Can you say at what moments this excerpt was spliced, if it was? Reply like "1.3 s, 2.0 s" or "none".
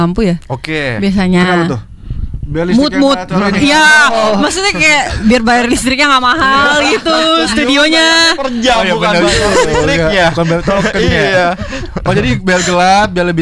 none